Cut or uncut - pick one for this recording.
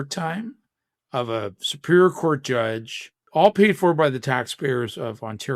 cut